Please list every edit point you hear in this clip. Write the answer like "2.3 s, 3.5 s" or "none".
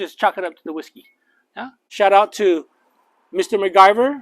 1.8 s